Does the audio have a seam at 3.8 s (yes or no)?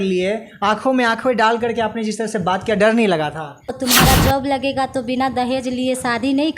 yes